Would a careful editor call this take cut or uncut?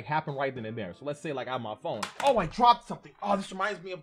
cut